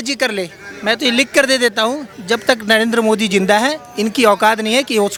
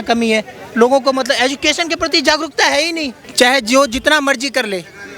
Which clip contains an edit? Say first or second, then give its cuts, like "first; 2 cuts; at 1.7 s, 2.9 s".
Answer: second; 1 cut; at 3.2 s